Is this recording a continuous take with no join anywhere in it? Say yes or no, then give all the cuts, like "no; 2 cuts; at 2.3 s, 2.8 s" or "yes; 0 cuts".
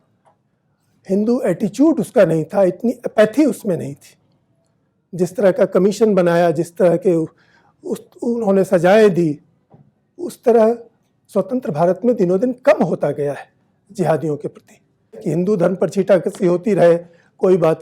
no; 1 cut; at 15.2 s